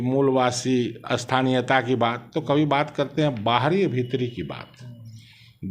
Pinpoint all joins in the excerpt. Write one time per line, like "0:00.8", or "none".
none